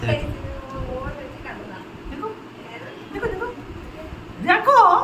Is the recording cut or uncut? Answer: uncut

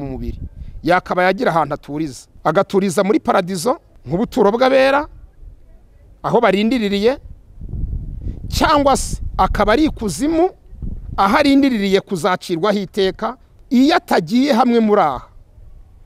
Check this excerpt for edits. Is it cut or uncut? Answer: cut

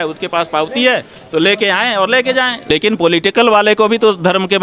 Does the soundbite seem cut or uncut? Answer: cut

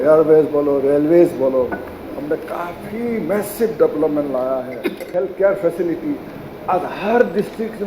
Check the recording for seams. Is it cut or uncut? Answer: cut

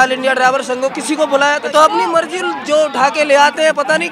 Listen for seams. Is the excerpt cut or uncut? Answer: cut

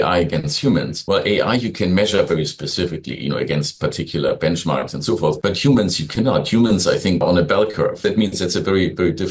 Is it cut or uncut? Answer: uncut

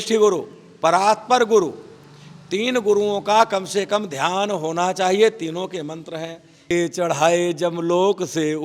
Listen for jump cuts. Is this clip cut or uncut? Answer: cut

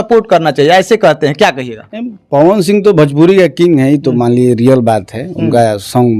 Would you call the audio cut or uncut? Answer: uncut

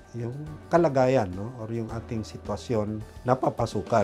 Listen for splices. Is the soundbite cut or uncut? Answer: cut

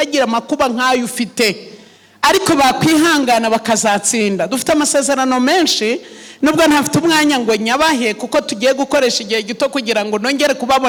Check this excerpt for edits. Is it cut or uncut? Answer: uncut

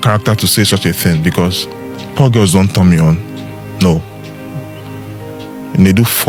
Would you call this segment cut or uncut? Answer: uncut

